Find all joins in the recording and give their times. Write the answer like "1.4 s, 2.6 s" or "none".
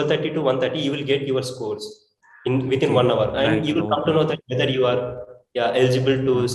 none